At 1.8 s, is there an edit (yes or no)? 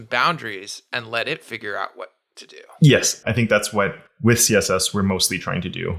no